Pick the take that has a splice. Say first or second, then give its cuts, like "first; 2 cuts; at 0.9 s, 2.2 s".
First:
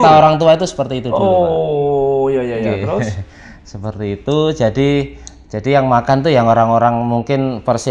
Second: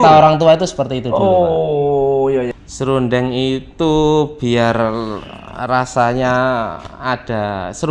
second; 1 cut; at 2.5 s